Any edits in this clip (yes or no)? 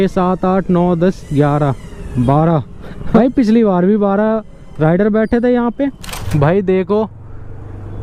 yes